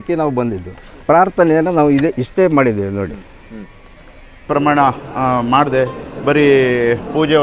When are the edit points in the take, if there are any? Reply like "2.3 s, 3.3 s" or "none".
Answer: 4.5 s

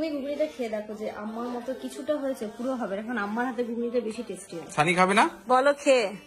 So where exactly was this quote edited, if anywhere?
5.4 s

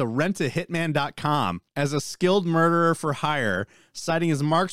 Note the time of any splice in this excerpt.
1.6 s

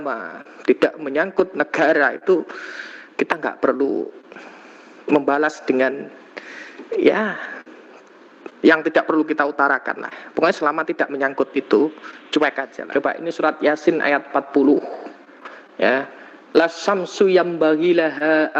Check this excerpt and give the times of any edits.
12.7 s

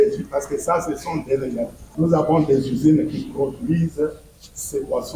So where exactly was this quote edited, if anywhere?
1.8 s

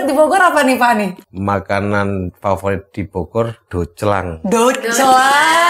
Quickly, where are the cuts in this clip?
1.3 s

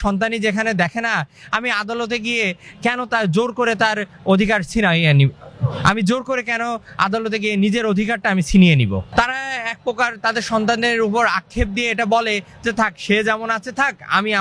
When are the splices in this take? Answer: none

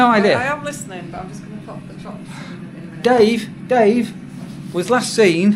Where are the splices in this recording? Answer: none

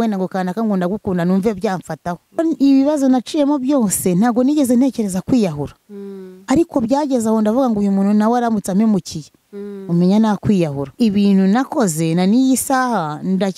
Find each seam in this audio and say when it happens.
2.4 s, 10.9 s

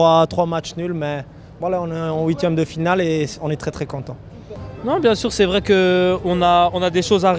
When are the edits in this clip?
none

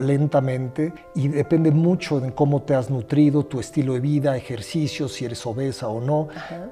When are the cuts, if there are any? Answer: 1.1 s

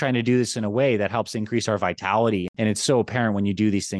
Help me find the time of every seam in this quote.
2.5 s

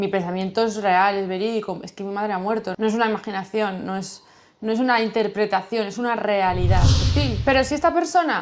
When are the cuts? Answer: 7.0 s

